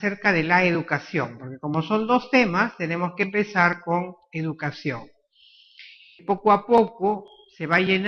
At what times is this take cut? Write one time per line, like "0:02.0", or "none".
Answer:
none